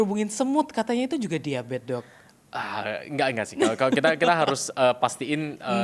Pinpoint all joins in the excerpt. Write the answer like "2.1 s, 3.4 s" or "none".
none